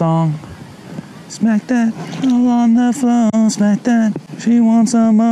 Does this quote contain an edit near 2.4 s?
no; 1 cut; at 4.3 s

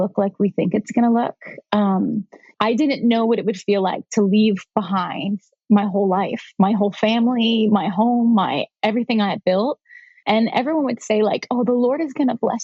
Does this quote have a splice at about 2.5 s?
yes; 2 cuts; at 2.5 s, 10.1 s

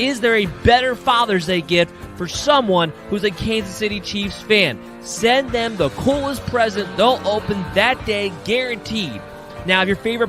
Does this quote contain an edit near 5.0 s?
no; 0 cuts

